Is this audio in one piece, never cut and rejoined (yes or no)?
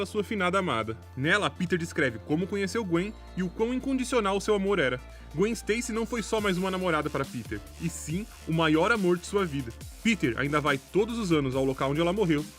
no